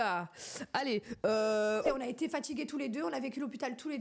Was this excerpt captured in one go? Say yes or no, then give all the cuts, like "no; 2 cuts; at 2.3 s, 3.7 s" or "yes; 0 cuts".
no; 1 cut; at 1.8 s